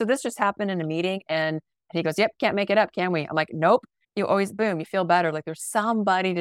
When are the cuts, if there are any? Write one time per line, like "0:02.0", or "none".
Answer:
0:01.8
0:04.0